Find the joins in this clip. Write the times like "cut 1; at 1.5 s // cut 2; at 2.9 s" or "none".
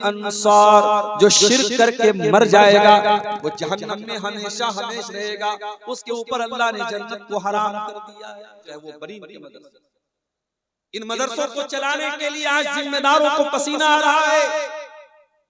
cut 1; at 8.6 s